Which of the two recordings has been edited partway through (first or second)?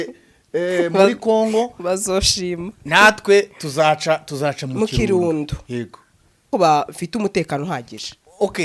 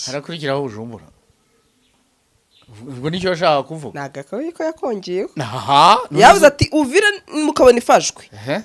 first